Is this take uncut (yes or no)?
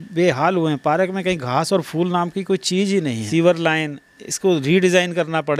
no